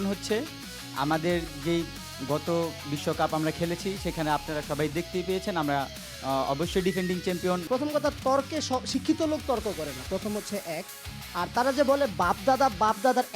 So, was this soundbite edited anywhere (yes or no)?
yes